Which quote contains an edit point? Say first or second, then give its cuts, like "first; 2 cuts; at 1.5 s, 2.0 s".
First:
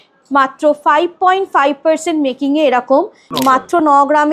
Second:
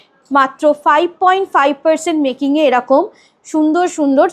first; 1 cut; at 3.2 s